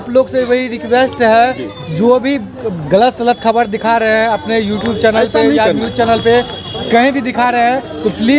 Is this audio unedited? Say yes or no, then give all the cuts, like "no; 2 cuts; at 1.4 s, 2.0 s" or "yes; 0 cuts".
yes; 0 cuts